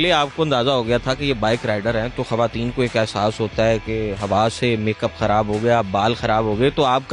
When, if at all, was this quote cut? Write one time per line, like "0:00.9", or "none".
none